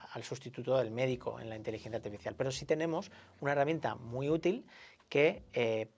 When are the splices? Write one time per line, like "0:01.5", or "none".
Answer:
none